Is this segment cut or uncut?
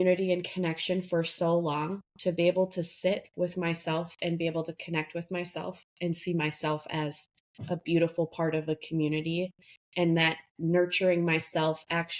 uncut